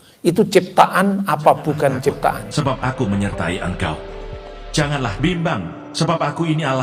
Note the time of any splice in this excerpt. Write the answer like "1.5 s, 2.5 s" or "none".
2.5 s

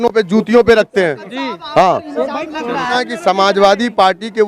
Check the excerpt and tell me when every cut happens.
2.9 s

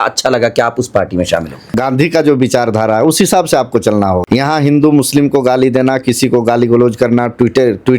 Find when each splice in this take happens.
1.8 s, 4.2 s

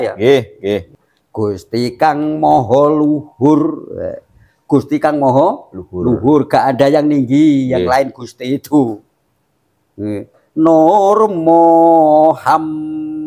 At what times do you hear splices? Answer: 0.9 s

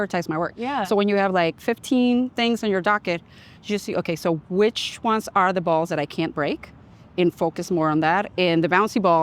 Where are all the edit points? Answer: none

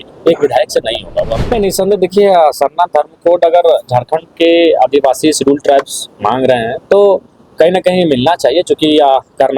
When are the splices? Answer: 1.4 s

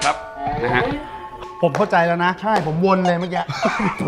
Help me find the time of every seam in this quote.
1.2 s

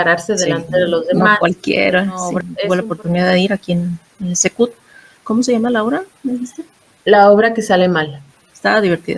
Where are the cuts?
2.5 s, 5.2 s

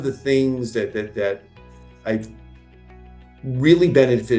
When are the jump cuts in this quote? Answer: none

